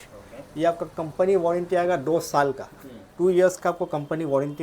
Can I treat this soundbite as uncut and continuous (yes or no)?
yes